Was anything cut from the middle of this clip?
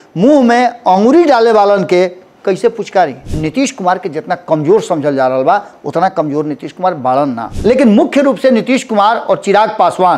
yes; 2 cuts; at 3.2 s, 7.5 s

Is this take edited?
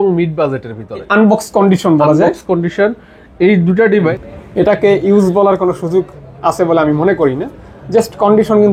yes; 2 cuts; at 1.1 s, 4.1 s

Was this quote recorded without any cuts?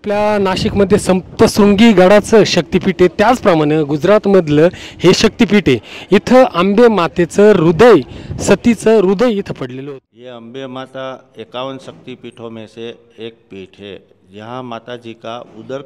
no; 1 cut; at 9.8 s

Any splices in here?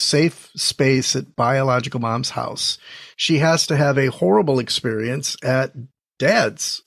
no; 0 cuts

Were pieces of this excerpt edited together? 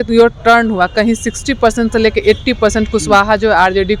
no; 0 cuts

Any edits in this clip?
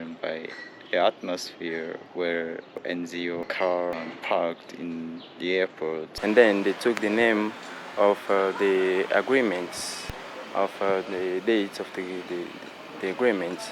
yes; 1 cut; at 6.1 s

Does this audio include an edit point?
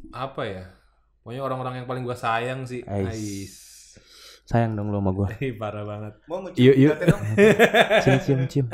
no; 0 cuts

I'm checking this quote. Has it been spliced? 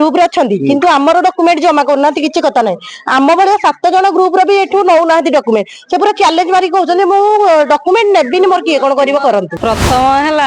yes; 1 cut; at 9.5 s

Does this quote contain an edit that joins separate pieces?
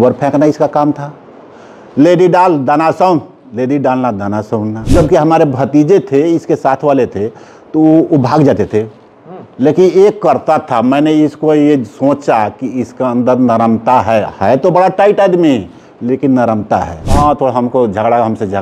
yes; 2 cuts; at 4.8 s, 17.0 s

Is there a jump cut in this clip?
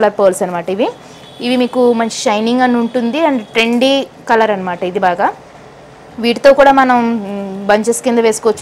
no; 0 cuts

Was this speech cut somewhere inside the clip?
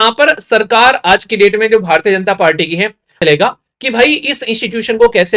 yes; 1 cut; at 3.2 s

